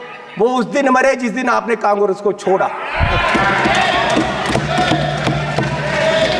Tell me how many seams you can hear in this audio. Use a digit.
0